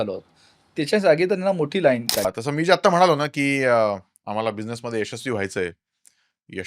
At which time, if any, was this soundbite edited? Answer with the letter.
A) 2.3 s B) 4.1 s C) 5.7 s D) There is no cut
A